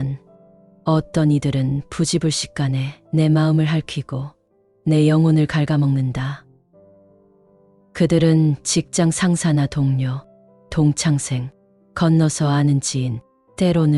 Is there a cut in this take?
no; 0 cuts

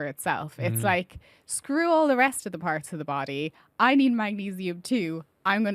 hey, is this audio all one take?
yes; 0 cuts

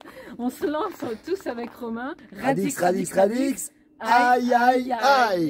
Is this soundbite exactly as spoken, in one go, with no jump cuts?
no; 1 cut; at 2.2 s

